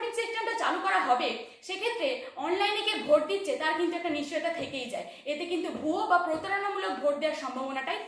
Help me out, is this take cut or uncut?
uncut